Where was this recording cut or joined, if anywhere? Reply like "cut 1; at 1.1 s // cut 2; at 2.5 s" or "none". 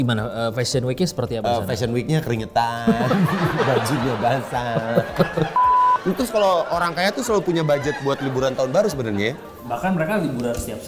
cut 1; at 5.6 s